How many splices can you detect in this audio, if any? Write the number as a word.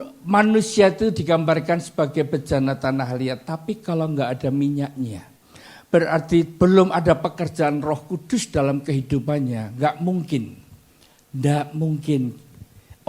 zero